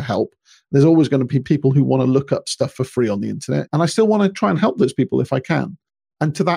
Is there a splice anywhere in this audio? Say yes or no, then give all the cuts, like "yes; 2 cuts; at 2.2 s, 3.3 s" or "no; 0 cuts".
yes; 2 cuts; at 1.4 s, 3.6 s